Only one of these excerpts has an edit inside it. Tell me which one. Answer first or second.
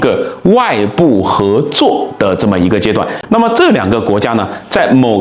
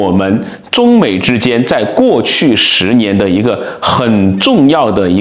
first